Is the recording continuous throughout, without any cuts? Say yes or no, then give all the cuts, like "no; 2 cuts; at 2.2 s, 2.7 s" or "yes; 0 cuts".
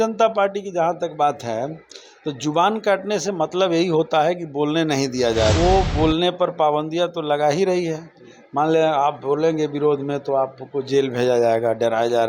no; 1 cut; at 5.5 s